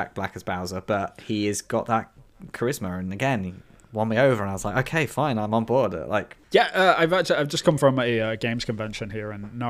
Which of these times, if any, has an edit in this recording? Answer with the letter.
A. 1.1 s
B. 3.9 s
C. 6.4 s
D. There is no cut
C